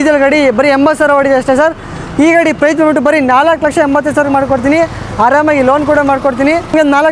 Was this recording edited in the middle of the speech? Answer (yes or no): no